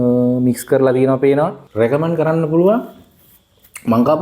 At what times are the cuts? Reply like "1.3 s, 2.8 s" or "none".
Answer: 1.6 s